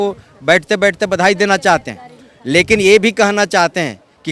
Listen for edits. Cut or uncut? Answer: uncut